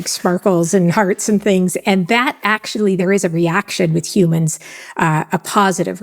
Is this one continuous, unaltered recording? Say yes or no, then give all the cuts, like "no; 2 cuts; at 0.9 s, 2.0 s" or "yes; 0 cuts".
no; 1 cut; at 3.0 s